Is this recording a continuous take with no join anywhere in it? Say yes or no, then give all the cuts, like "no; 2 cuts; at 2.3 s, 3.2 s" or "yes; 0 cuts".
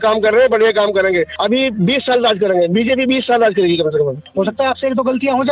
no; 2 cuts; at 1.3 s, 4.2 s